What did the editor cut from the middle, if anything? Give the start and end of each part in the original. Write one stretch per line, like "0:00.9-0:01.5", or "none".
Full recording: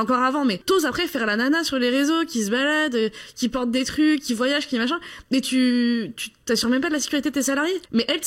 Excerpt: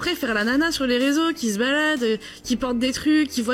none